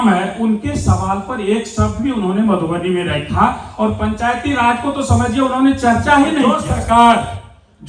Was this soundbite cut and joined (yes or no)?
yes